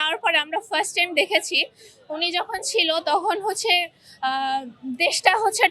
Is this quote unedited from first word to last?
yes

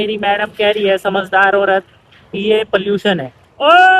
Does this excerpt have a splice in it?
no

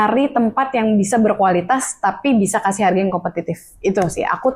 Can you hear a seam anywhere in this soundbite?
no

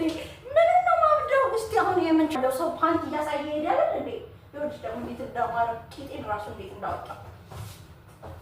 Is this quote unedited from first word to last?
no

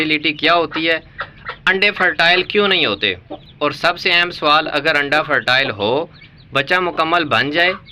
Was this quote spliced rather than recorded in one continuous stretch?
no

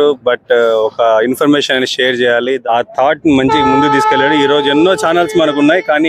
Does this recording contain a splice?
yes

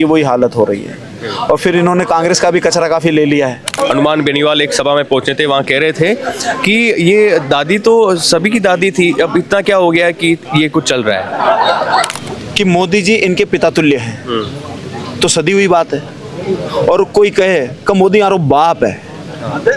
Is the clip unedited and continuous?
no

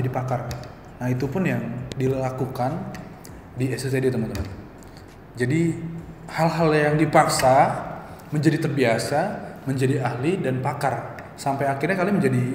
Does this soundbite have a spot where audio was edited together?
no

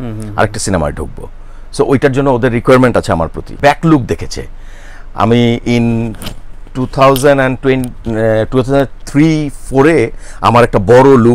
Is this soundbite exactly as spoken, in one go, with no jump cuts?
no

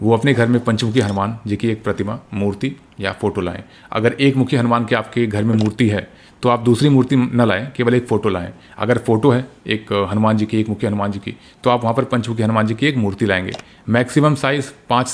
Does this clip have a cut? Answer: no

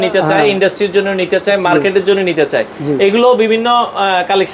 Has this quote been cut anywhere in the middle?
no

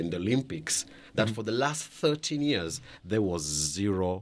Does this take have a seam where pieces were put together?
no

